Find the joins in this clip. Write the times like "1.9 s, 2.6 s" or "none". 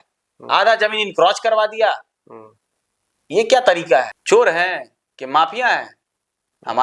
4.2 s